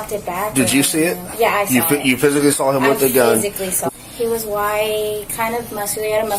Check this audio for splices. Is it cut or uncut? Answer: cut